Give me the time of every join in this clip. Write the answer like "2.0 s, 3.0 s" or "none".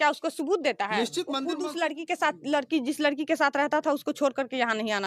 1.5 s